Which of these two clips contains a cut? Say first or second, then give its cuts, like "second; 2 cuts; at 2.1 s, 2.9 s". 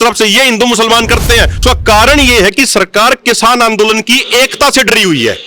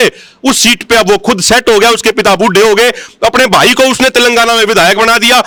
first; 1 cut; at 1.6 s